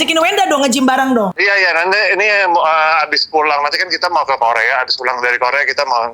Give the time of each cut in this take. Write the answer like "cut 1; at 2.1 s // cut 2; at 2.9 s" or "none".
cut 1; at 1.4 s

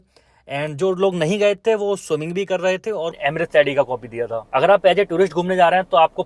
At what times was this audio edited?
cut 1; at 3.2 s

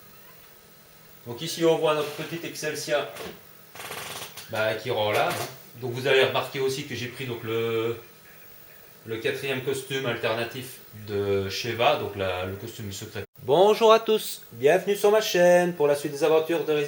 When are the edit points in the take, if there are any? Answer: none

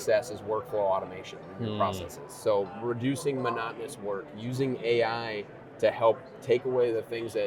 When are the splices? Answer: none

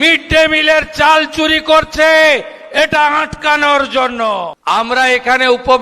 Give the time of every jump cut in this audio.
cut 1; at 4.5 s

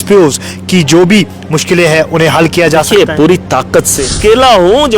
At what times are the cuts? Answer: cut 1; at 3.9 s

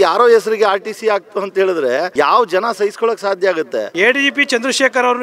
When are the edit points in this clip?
cut 1; at 2.1 s // cut 2; at 3.9 s

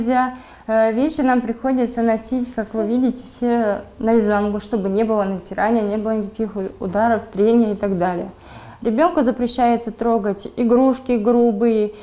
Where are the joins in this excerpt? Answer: none

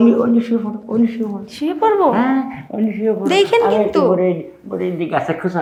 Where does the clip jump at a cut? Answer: none

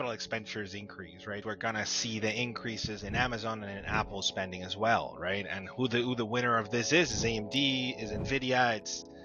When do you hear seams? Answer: cut 1; at 1.4 s

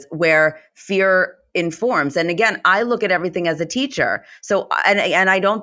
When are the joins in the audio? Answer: none

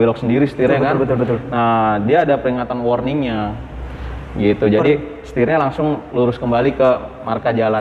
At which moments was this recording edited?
none

